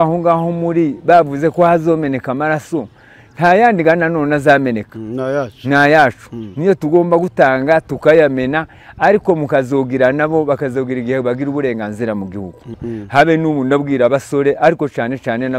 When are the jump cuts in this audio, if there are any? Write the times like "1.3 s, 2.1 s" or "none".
12.8 s